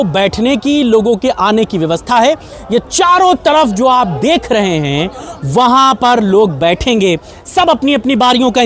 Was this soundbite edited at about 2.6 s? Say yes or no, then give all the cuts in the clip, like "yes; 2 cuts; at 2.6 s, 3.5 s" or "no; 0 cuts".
no; 0 cuts